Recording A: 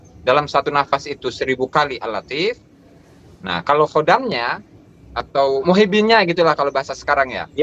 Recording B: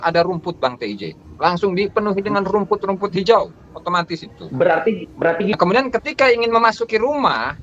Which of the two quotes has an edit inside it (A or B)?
B